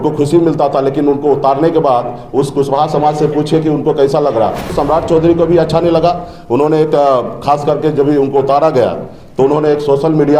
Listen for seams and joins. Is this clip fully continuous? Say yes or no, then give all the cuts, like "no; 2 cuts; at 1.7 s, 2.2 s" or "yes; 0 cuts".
no; 1 cut; at 4.7 s